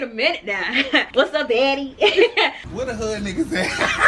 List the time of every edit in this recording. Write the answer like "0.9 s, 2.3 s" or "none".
1.1 s, 2.7 s